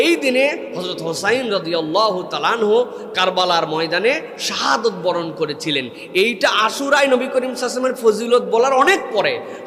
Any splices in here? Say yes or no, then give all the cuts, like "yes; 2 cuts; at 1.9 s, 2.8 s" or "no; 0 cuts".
no; 0 cuts